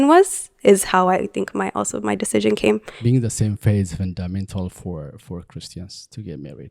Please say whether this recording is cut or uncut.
cut